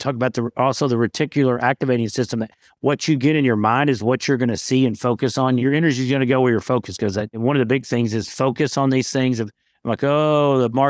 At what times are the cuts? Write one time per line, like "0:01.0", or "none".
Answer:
0:05.6
0:07.4